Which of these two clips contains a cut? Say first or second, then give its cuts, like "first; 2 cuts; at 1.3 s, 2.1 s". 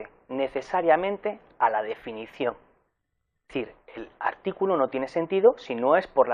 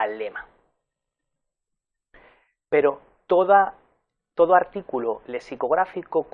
second; 1 cut; at 3.2 s